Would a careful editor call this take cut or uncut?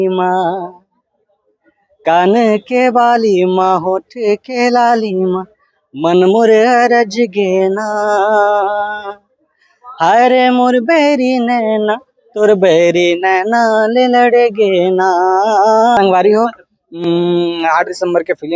cut